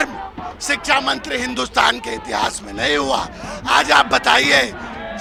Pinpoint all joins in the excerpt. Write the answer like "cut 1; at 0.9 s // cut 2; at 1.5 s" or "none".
none